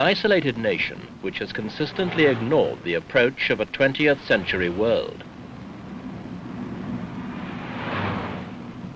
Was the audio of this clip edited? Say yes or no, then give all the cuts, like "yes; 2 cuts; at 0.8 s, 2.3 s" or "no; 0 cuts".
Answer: yes; 1 cut; at 6.2 s